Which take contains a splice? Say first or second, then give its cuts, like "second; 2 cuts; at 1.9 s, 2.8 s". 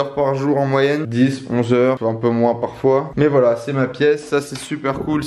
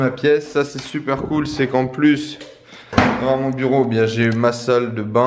first; 2 cuts; at 1.1 s, 2.0 s